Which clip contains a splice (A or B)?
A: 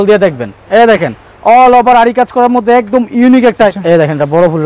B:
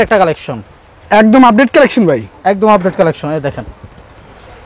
A